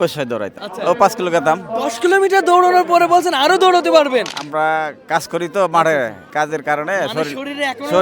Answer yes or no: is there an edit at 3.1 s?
no